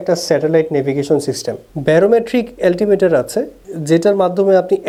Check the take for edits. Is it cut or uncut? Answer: uncut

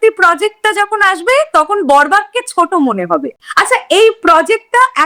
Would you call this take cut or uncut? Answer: uncut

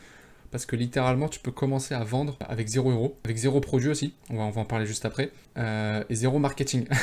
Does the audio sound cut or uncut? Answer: cut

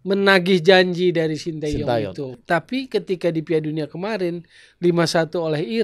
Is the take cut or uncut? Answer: cut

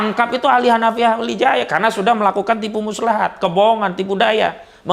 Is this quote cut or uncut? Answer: uncut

